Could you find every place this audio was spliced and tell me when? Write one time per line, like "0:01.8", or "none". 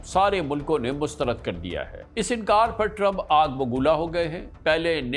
none

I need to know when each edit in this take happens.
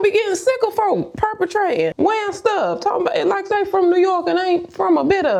none

